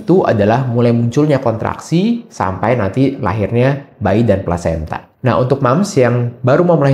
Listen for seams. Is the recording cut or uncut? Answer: uncut